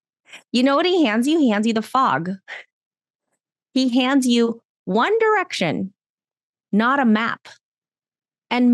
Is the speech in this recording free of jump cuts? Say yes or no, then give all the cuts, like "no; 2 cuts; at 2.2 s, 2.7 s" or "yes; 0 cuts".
yes; 0 cuts